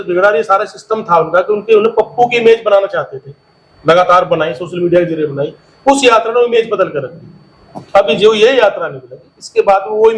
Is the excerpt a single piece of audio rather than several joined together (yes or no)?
yes